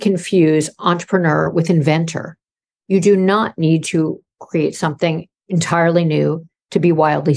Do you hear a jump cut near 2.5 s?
no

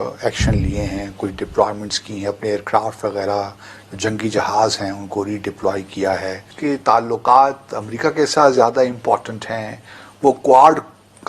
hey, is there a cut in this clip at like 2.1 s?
no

